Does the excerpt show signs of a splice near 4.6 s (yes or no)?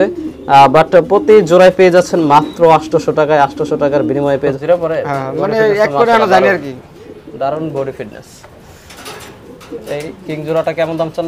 yes